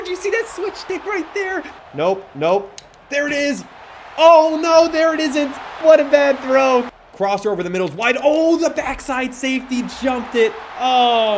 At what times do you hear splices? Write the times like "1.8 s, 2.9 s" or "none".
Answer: 1.7 s, 6.9 s